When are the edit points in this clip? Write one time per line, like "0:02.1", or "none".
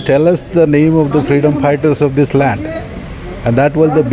none